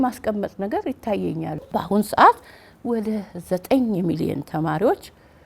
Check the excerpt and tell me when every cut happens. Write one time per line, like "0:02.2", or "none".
0:01.6